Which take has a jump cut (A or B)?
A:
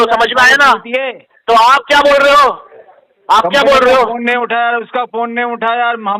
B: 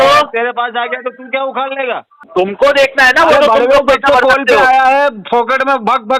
B